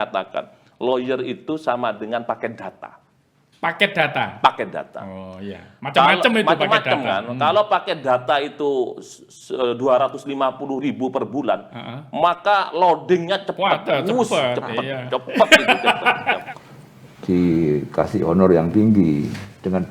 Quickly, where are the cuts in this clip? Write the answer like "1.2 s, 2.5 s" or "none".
16.4 s

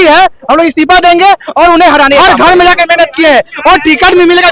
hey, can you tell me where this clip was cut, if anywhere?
2.2 s

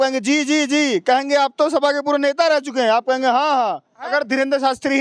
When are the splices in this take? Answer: 4.0 s

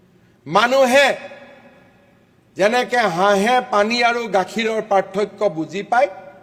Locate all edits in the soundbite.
none

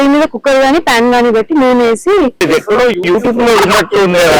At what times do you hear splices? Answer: 2.4 s

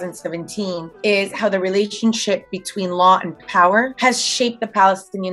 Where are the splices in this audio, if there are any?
none

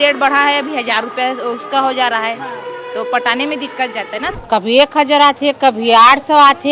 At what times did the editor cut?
4.4 s

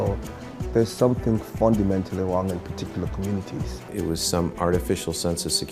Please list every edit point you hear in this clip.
3.9 s

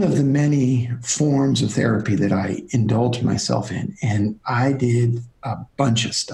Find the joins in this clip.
none

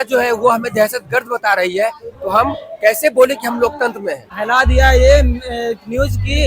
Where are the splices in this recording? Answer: 4.3 s

